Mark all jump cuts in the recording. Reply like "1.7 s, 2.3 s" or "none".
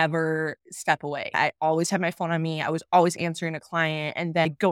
1.3 s